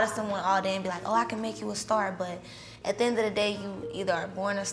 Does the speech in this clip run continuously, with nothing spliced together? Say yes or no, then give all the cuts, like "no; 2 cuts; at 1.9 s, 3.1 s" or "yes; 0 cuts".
yes; 0 cuts